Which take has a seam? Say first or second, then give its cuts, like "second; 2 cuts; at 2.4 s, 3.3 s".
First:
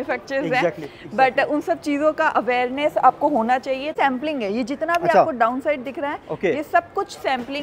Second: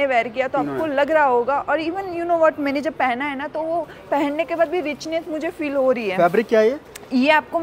first; 1 cut; at 3.9 s